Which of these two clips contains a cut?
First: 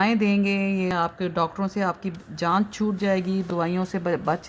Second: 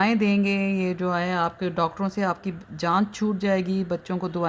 first; 2 cuts; at 0.9 s, 3.5 s

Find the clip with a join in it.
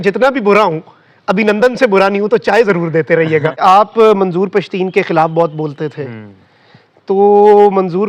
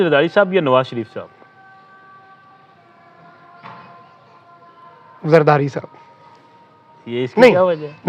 first; 1 cut; at 3.6 s

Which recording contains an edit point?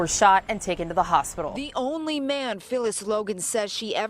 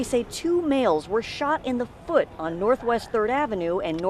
first; 1 cut; at 1.6 s

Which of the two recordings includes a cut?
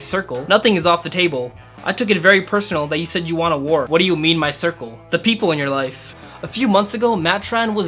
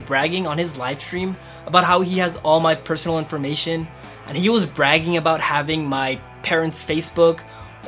first; 2 cuts; at 3.9 s, 6.1 s

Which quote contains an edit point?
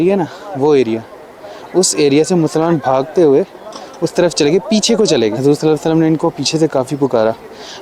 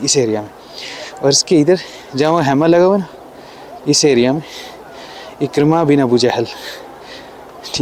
first; 1 cut; at 5.4 s

